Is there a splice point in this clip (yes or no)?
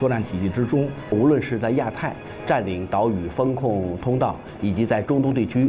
yes